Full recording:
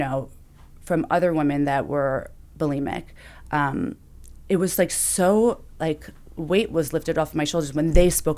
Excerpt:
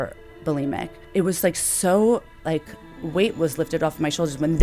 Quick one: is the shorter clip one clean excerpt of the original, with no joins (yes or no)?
no